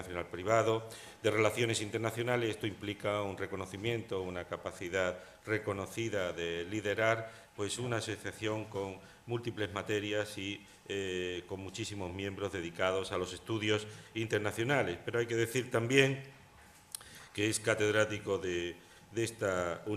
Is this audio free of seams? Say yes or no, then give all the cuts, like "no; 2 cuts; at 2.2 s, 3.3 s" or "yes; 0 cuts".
yes; 0 cuts